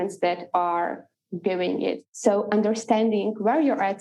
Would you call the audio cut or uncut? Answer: cut